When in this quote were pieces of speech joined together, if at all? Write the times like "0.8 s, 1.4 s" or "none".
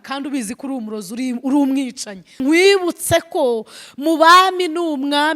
2.3 s

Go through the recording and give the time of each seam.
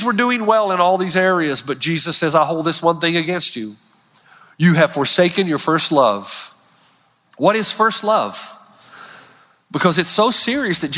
2.1 s

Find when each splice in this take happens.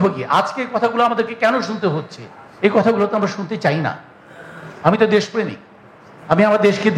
none

